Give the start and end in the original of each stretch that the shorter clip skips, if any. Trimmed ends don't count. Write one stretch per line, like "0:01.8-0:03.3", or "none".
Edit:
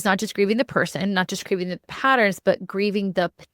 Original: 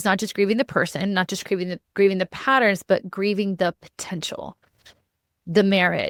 0:01.9-0:02.3